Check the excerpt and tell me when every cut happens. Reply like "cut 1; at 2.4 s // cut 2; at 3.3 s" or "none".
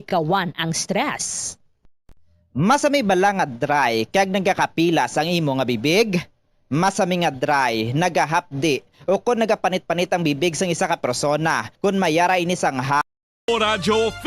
cut 1; at 13.0 s